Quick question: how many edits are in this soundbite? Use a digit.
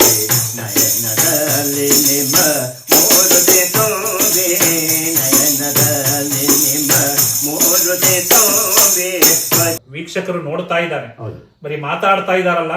1